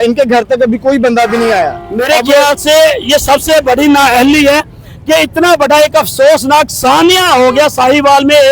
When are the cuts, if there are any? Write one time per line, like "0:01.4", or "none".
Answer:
none